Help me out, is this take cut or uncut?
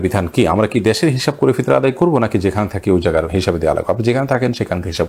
uncut